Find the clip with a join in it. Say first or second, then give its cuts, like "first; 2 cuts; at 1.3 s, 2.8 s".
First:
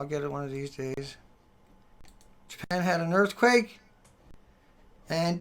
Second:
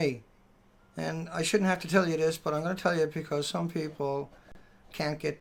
first; 1 cut; at 3.2 s